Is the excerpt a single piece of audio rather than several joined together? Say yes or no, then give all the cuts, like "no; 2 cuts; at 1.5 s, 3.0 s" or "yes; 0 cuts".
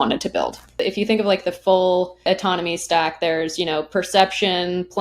no; 2 cuts; at 0.8 s, 2.3 s